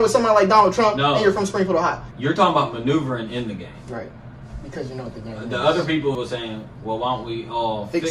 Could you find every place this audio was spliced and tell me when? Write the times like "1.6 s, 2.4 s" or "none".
2.0 s, 6.1 s